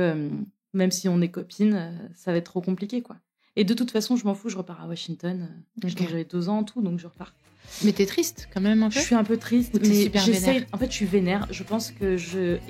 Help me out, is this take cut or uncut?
uncut